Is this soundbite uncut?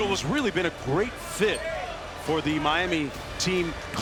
yes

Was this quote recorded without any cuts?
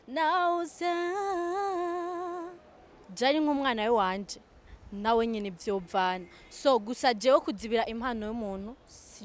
no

